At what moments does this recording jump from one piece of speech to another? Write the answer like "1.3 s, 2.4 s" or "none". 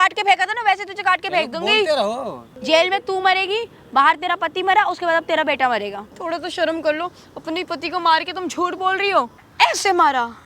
2.5 s, 6.1 s, 9.4 s